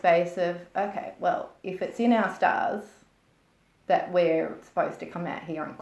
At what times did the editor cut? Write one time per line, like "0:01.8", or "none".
none

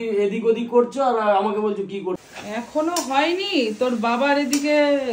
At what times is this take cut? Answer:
0:02.2

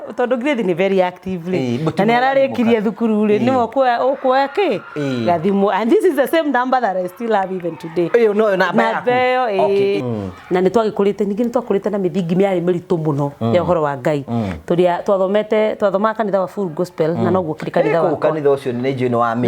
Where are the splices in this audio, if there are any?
0:10.0

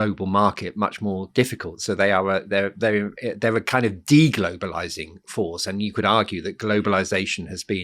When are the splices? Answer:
none

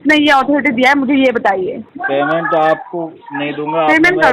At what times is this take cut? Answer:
0:01.8

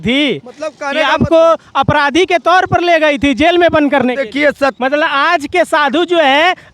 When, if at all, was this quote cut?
0:04.8

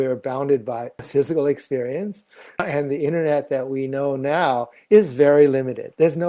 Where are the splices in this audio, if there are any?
0:01.0
0:02.6

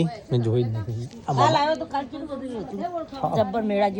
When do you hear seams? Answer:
none

